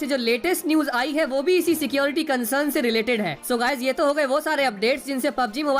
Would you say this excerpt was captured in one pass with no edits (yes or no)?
no